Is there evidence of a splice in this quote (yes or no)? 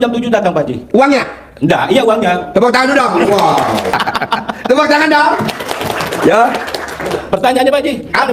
yes